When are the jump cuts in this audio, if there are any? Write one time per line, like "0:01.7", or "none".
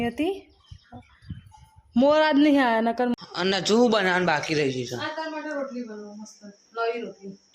0:03.1